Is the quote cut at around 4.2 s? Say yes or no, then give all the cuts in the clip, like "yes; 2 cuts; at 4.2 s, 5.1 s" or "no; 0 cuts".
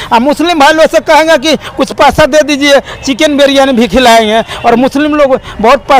no; 0 cuts